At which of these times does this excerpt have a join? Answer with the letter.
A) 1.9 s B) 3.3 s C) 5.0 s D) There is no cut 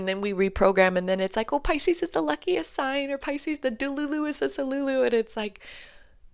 D